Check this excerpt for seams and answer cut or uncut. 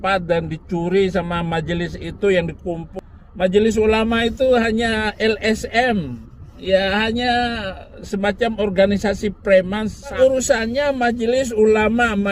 cut